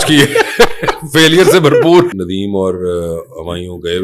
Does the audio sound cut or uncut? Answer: cut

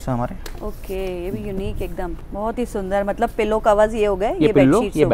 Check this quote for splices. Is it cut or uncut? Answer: cut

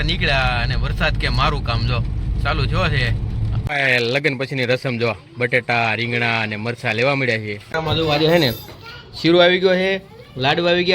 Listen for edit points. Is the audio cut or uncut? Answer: cut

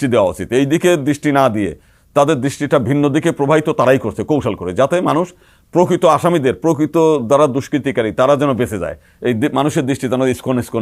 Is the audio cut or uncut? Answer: uncut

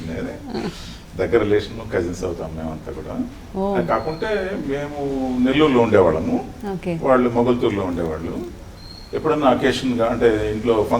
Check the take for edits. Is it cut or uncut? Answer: uncut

